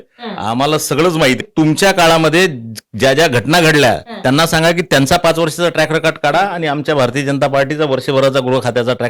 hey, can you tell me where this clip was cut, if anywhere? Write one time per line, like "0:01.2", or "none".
0:01.4